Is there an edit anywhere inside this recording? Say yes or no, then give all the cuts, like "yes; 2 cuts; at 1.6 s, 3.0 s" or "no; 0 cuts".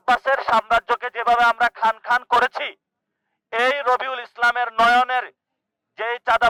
no; 0 cuts